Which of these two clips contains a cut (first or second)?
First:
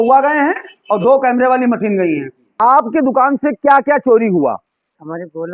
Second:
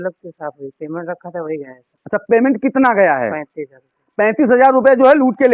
first